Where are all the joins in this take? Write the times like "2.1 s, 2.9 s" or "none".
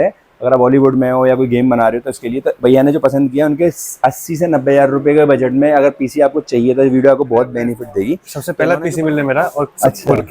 8.2 s